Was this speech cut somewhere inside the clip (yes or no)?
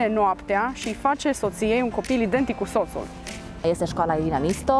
yes